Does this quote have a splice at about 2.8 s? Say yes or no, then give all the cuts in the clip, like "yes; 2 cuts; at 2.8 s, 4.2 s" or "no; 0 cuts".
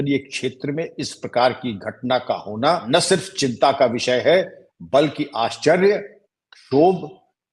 yes; 1 cut; at 2.8 s